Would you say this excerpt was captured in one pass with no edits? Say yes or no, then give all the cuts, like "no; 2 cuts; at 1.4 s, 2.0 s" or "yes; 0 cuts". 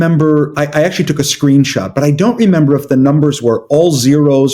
yes; 0 cuts